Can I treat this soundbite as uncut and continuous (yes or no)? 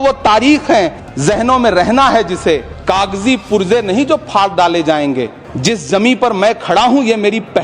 no